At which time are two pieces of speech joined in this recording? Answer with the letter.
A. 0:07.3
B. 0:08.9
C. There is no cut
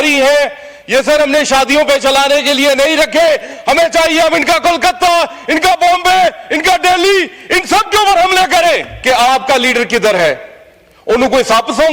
B